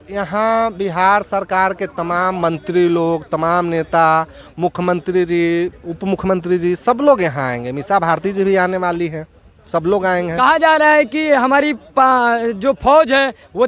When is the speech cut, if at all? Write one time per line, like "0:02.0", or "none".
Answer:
none